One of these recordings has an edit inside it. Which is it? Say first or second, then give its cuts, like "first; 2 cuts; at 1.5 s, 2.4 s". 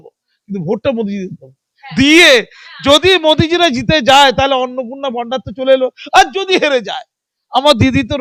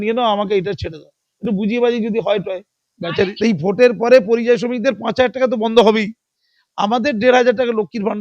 second; 1 cut; at 3.3 s